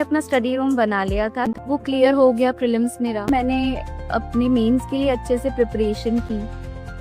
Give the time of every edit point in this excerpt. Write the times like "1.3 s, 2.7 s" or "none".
1.6 s, 3.3 s